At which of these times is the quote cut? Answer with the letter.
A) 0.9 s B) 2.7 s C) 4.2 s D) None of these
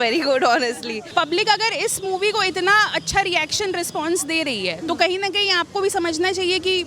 A